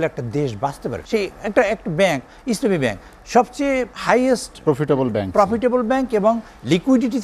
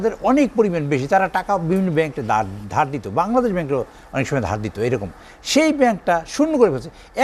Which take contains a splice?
first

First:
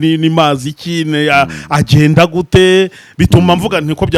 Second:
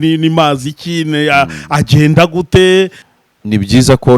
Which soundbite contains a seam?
second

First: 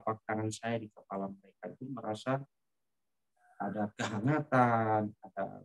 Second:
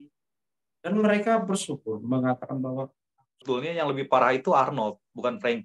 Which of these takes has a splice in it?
second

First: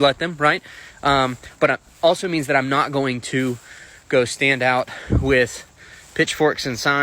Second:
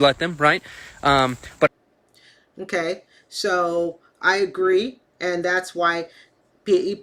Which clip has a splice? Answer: first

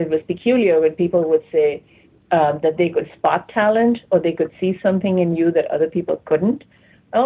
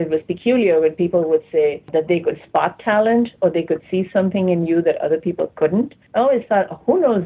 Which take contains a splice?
second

